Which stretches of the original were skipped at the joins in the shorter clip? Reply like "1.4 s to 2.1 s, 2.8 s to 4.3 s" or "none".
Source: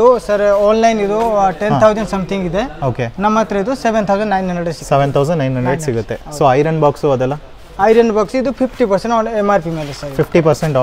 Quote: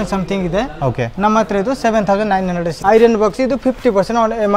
4.7 s to 7.6 s